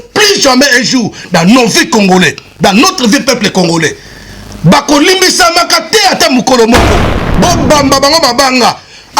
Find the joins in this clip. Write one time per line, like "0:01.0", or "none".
0:07.2